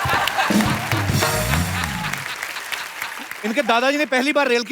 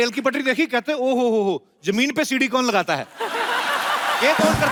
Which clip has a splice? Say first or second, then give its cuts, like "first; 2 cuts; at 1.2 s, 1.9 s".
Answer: first; 1 cut; at 3.3 s